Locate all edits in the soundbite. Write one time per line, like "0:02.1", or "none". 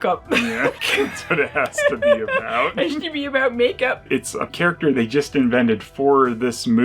0:00.8
0:04.0